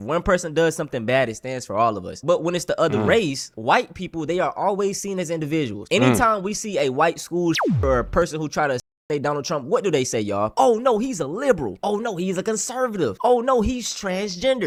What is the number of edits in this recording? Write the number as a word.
zero